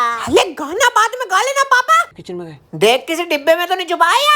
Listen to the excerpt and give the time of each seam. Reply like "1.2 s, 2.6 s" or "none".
2.1 s